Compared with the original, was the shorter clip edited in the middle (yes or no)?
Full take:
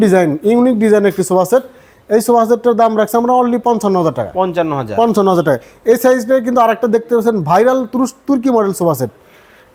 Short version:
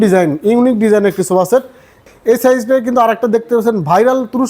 yes